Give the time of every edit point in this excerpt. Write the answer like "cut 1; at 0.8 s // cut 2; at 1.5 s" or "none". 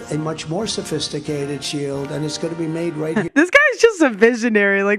cut 1; at 3.3 s